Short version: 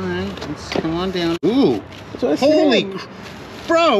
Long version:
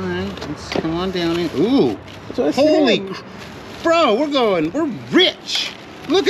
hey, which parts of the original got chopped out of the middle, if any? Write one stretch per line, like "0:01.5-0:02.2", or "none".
0:01.4-0:01.5